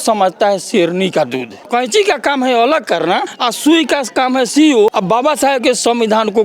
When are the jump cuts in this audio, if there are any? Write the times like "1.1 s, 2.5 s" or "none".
1.6 s, 3.4 s, 4.9 s